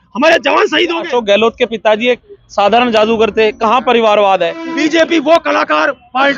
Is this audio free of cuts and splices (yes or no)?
no